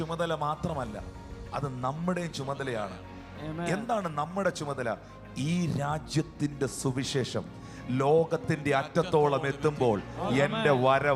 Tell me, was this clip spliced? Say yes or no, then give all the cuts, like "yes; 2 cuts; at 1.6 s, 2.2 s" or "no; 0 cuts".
no; 0 cuts